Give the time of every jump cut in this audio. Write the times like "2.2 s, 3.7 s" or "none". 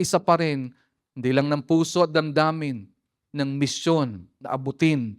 none